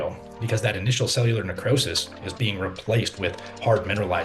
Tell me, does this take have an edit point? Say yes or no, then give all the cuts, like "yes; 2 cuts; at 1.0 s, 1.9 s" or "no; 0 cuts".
no; 0 cuts